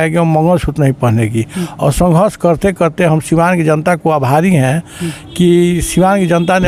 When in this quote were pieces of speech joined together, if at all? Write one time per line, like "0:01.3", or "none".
none